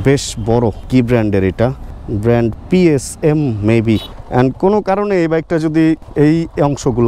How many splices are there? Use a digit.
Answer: 1